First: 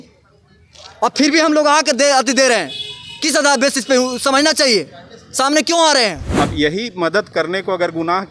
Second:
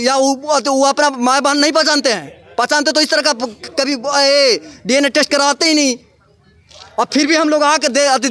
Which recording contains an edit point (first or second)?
first